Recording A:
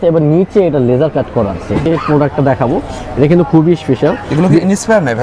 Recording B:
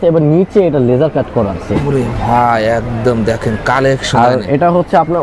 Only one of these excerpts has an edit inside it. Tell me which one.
A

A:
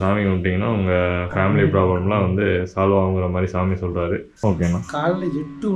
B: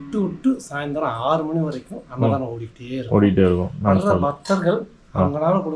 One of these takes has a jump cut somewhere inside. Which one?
A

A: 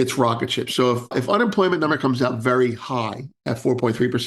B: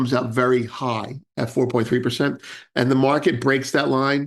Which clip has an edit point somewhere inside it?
A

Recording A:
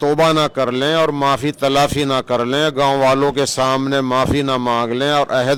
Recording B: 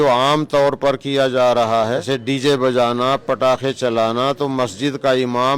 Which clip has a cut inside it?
B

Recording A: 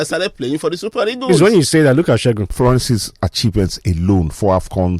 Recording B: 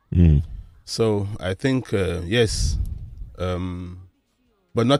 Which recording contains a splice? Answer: A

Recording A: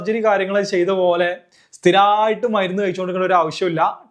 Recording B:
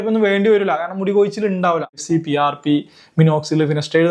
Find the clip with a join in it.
B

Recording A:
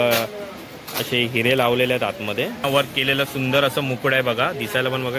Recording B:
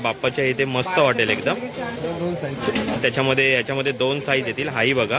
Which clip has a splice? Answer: A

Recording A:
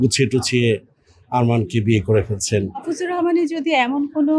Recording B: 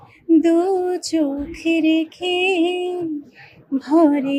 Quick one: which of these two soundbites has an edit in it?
A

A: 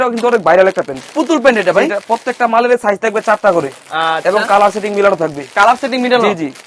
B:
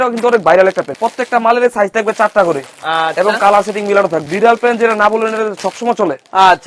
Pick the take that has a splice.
B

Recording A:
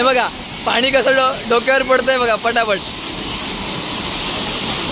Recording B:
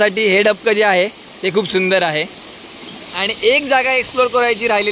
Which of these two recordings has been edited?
B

